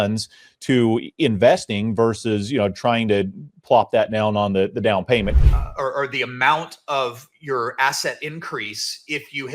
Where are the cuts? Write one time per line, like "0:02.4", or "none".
0:05.3